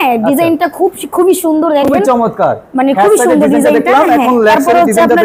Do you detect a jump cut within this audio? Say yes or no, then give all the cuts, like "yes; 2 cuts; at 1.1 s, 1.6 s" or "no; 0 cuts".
no; 0 cuts